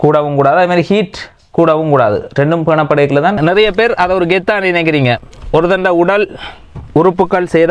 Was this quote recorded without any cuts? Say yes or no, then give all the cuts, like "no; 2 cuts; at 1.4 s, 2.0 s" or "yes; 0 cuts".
no; 1 cut; at 3.4 s